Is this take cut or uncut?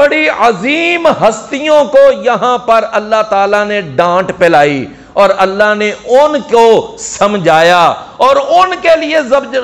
uncut